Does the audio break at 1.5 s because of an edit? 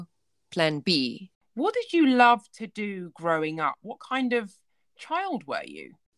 no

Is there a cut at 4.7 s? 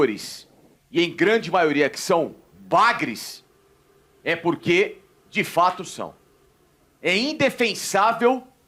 no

